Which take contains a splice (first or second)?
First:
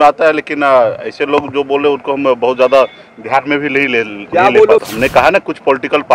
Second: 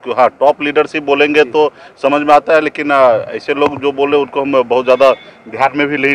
first